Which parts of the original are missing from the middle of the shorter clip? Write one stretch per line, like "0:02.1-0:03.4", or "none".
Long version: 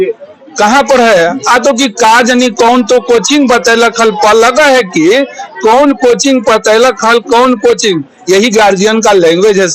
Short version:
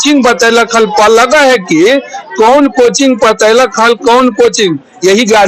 none